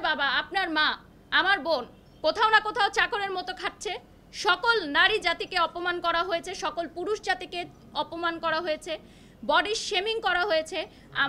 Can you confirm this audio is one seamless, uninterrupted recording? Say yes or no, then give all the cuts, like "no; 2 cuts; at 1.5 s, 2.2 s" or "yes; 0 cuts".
yes; 0 cuts